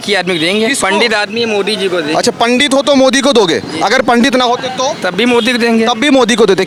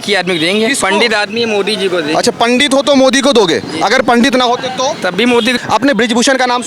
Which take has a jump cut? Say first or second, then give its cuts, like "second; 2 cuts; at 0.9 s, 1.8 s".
second; 1 cut; at 5.6 s